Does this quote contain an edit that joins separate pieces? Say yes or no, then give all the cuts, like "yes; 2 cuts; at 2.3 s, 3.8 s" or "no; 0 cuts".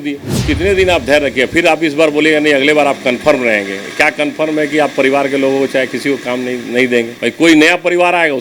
no; 0 cuts